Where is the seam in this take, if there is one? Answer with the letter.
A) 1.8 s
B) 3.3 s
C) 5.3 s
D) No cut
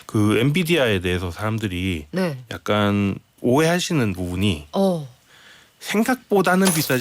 B